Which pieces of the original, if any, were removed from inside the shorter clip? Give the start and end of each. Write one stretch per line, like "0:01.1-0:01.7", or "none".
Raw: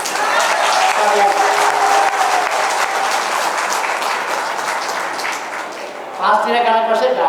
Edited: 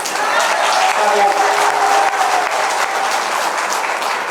none